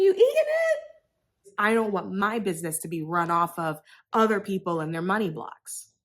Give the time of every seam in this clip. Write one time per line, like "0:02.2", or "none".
0:01.5